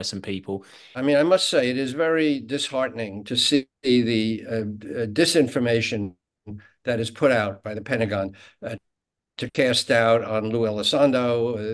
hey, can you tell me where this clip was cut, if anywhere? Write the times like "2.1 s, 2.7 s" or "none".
1.0 s